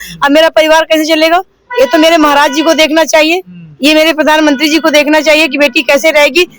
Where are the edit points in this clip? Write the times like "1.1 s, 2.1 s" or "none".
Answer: none